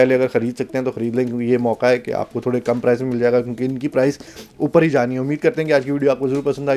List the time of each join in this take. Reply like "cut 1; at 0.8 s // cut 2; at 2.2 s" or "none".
none